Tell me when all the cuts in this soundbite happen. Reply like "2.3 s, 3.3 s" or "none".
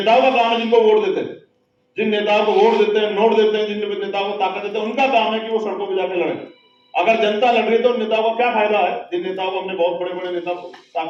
none